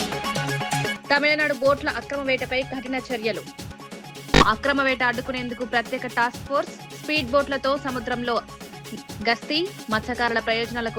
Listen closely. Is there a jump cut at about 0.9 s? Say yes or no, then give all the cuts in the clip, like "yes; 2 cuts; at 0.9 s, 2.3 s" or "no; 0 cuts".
yes; 1 cut; at 0.9 s